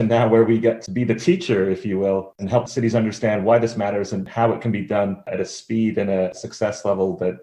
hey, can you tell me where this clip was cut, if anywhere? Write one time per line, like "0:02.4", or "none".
0:00.8
0:02.7
0:04.3
0:05.3
0:06.3